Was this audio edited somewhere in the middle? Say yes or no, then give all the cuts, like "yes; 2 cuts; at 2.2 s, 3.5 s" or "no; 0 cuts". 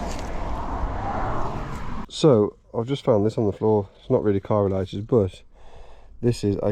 yes; 1 cut; at 2.1 s